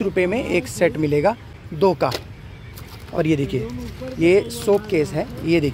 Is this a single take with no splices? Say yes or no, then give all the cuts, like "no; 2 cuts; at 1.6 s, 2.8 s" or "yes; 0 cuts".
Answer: yes; 0 cuts